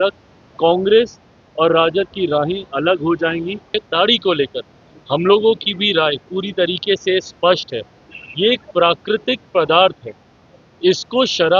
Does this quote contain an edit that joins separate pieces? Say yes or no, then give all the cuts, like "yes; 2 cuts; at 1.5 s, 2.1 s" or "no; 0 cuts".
yes; 1 cut; at 3.8 s